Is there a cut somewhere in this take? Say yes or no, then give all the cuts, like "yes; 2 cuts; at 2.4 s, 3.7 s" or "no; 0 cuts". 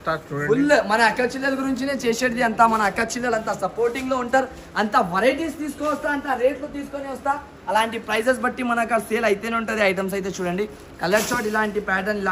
no; 0 cuts